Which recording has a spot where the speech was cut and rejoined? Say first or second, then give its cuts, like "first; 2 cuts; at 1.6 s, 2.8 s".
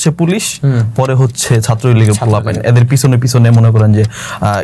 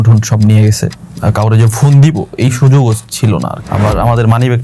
second; 1 cut; at 3.6 s